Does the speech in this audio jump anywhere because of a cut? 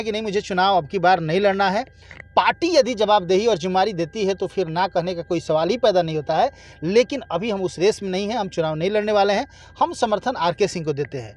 no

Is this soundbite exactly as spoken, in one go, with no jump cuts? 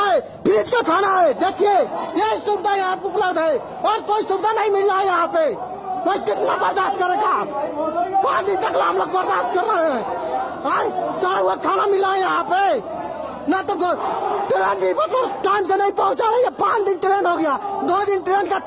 yes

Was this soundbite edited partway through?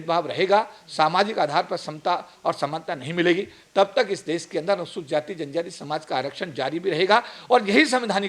no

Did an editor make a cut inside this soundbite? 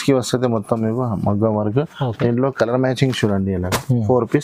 no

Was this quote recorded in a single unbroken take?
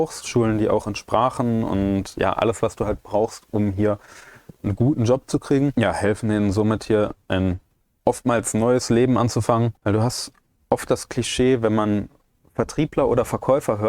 no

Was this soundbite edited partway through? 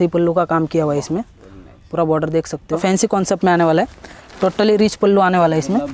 yes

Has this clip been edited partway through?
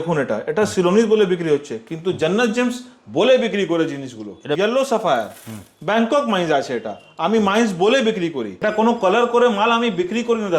yes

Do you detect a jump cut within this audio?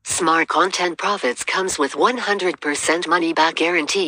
yes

